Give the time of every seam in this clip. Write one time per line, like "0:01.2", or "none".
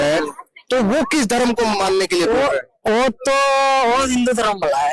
none